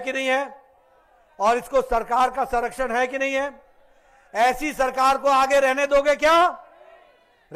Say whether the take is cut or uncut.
uncut